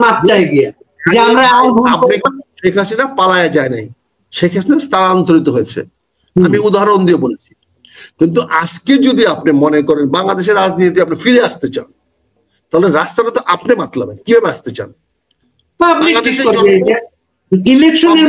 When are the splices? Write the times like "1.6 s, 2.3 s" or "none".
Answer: 2.2 s